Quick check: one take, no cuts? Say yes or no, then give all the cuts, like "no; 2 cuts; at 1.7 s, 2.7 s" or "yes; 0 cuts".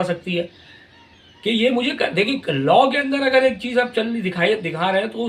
yes; 0 cuts